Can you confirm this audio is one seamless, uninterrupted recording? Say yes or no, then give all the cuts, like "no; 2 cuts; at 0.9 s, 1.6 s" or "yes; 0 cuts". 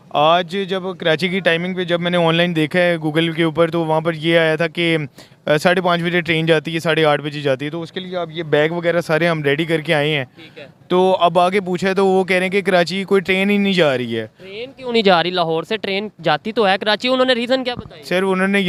yes; 0 cuts